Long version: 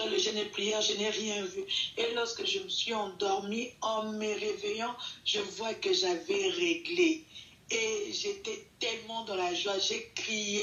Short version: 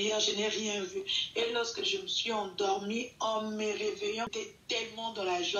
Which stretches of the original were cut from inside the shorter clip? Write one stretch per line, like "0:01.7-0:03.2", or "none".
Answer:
0:04.9-0:08.4